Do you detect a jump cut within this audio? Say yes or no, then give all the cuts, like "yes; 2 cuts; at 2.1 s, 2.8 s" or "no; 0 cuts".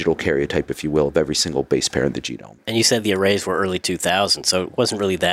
yes; 1 cut; at 2.6 s